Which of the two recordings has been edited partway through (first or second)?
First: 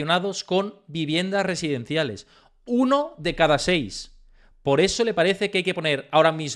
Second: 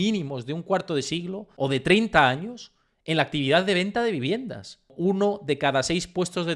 second